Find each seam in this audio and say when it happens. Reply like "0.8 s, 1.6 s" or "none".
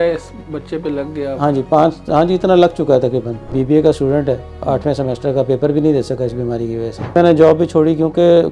3.4 s, 7.0 s